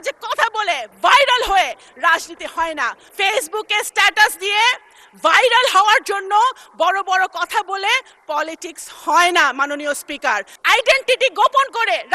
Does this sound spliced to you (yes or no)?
yes